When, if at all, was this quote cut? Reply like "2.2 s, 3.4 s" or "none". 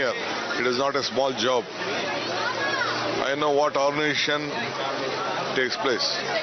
5.2 s